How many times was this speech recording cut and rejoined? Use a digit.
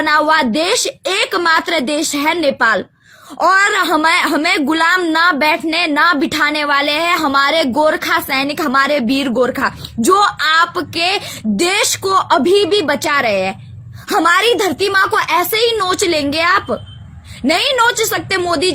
0